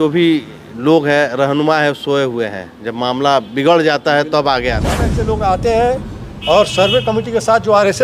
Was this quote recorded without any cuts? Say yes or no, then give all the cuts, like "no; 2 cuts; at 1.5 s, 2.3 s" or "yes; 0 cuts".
no; 1 cut; at 5.1 s